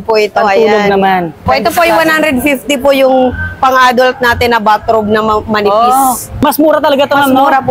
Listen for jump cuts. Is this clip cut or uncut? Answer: cut